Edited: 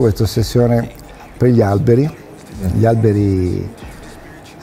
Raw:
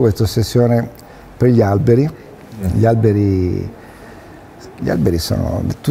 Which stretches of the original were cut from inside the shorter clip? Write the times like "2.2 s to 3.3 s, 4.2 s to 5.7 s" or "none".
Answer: none